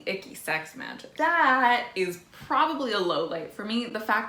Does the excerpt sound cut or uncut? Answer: uncut